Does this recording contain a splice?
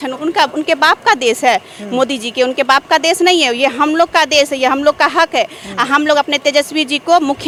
no; 0 cuts

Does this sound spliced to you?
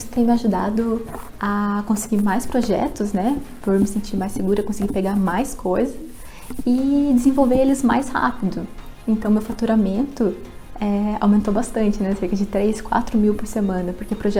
no; 0 cuts

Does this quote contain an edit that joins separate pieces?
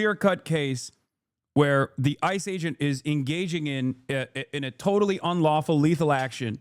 no; 0 cuts

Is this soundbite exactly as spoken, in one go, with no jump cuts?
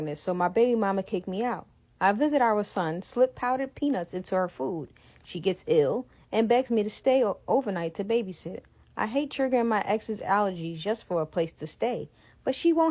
yes; 0 cuts

